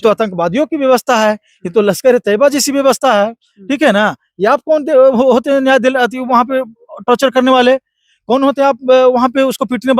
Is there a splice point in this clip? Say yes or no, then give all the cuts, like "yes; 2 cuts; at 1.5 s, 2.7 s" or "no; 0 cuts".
no; 0 cuts